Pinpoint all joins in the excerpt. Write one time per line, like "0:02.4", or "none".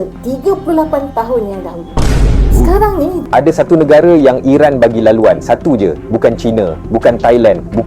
0:03.2